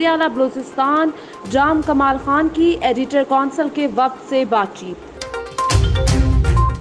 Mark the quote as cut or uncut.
cut